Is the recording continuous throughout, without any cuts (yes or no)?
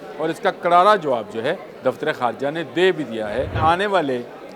no